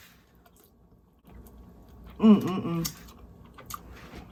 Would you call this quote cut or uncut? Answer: uncut